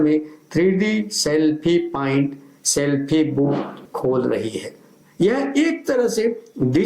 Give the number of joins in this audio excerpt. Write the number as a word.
two